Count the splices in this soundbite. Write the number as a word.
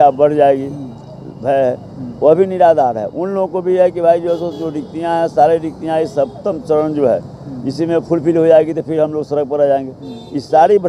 zero